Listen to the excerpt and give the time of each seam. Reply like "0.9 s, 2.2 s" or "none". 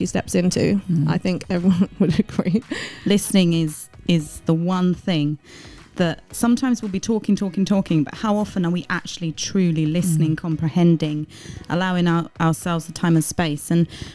2.9 s